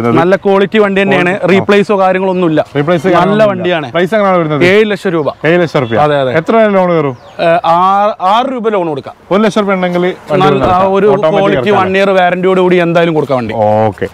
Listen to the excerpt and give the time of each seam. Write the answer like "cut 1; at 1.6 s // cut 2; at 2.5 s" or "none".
none